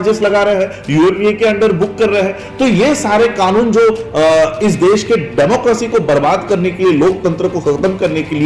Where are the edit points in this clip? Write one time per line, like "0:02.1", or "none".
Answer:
none